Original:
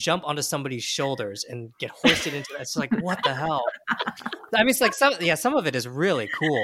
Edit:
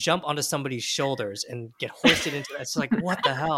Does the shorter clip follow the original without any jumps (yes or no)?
yes